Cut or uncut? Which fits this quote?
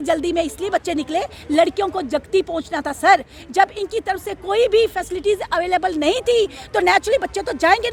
uncut